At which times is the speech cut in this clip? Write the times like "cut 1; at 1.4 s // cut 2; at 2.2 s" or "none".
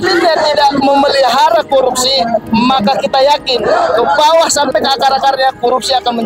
none